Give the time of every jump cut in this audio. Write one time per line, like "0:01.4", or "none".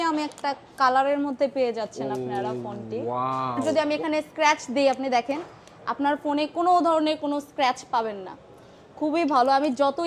0:03.6